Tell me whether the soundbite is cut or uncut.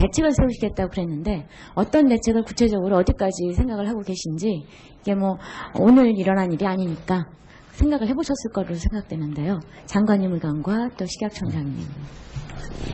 uncut